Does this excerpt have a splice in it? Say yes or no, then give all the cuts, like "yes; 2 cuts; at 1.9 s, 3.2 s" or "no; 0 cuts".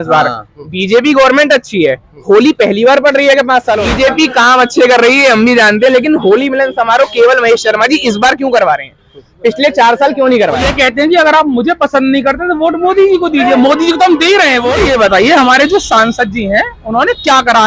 yes; 3 cuts; at 3.9 s, 10.7 s, 14.8 s